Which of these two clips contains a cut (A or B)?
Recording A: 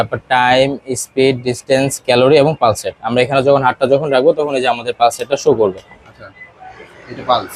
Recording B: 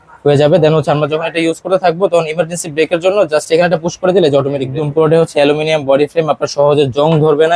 B